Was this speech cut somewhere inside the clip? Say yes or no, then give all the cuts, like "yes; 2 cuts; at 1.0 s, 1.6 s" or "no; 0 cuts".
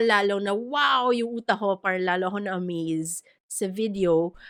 no; 0 cuts